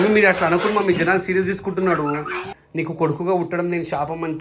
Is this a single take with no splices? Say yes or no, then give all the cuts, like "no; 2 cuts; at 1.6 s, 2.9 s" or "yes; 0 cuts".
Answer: no; 1 cut; at 2.5 s